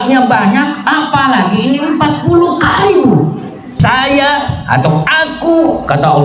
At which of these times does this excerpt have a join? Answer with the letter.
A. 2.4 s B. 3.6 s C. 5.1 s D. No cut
B